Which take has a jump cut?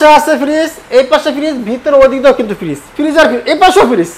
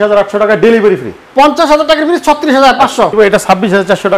second; 1 cut; at 3.1 s

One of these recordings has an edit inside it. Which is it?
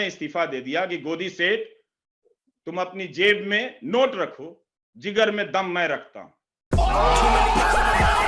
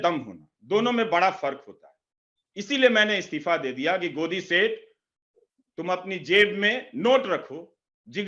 first; 1 cut; at 6.7 s

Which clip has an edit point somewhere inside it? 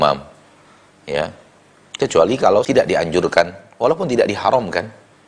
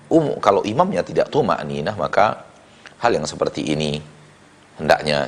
first; 1 cut; at 2.6 s

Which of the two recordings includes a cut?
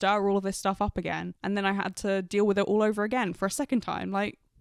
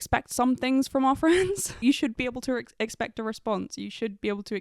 second; 1 cut; at 1.8 s

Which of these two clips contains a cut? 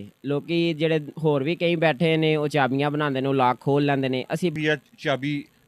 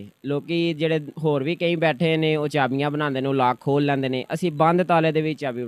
first; 1 cut; at 4.5 s

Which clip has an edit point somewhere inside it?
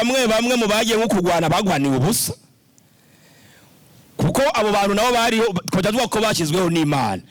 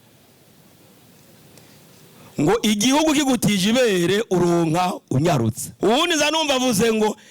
second; 1 cut; at 5.6 s

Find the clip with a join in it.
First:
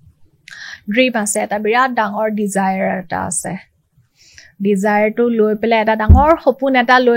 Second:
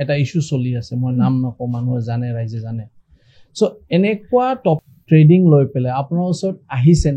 second; 1 cut; at 4.8 s

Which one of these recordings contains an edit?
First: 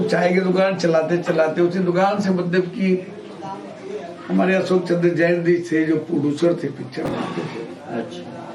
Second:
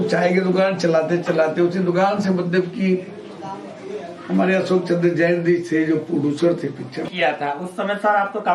second; 1 cut; at 7.1 s

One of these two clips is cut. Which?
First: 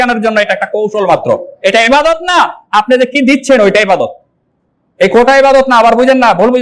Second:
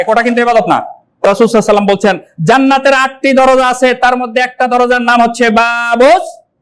second; 1 cut; at 1.3 s

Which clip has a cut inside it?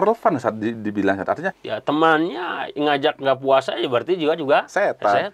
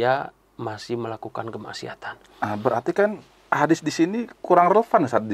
first; 1 cut; at 1.6 s

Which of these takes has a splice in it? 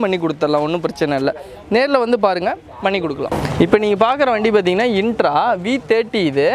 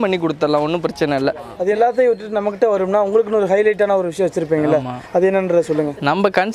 second; 1 cut; at 1.5 s

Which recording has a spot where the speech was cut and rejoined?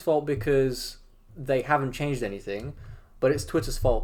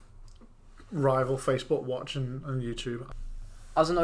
second; 1 cut; at 3.1 s

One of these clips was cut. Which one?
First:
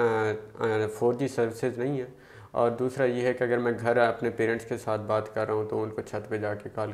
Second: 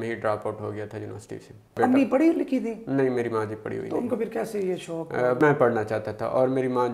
second; 2 cuts; at 1.8 s, 5.4 s

